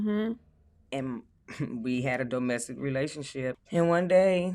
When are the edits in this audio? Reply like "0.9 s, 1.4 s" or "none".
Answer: 3.6 s